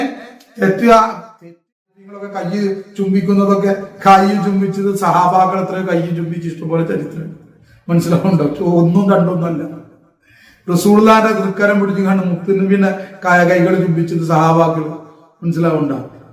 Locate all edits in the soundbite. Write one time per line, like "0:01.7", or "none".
0:01.8